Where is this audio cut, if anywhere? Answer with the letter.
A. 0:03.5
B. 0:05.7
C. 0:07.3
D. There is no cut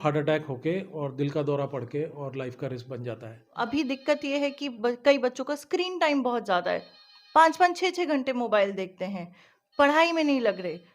A